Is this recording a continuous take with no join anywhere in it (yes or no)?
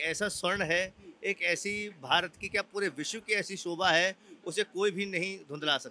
yes